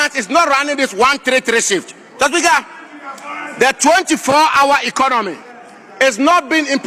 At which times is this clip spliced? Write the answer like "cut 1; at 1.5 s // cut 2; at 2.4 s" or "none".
none